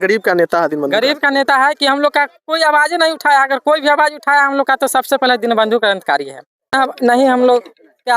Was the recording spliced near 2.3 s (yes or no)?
no